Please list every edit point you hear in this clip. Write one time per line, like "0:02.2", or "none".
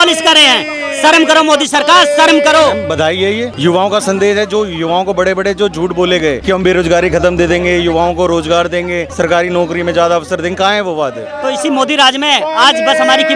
0:03.0
0:06.4
0:09.0
0:11.3